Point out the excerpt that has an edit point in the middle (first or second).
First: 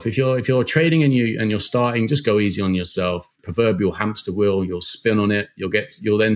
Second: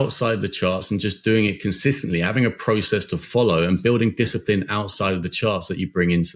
first